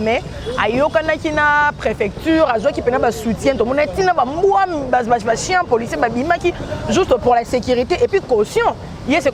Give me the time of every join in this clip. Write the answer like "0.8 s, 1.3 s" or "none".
none